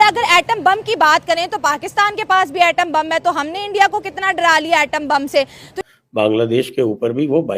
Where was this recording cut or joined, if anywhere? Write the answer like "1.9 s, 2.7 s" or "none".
5.7 s